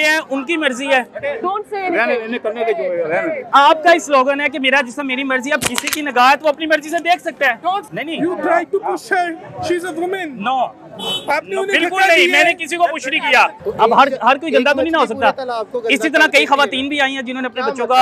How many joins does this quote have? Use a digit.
3